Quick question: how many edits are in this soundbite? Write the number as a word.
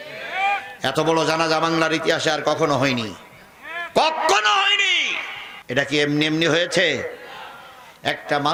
zero